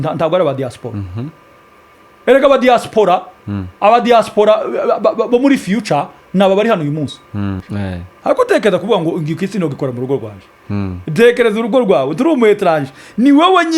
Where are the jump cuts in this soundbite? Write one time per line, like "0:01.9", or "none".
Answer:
0:07.7